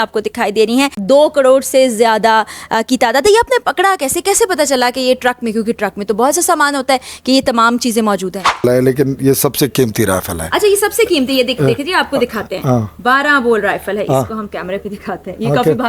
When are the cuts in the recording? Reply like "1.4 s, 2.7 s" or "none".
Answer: 1.0 s, 8.6 s